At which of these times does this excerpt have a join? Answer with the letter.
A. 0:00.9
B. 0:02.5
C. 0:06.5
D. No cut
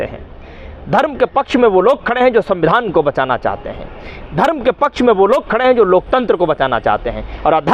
D